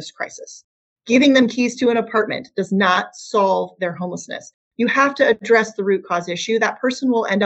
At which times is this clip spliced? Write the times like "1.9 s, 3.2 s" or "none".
none